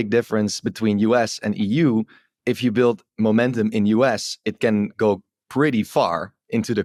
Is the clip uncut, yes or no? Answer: yes